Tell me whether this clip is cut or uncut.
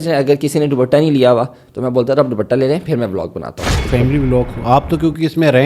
cut